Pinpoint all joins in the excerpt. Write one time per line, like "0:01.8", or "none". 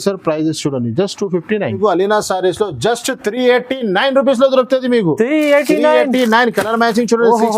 0:01.8